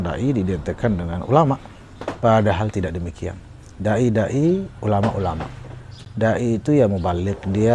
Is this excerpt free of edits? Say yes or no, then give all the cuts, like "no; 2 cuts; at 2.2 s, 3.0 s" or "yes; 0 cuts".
yes; 0 cuts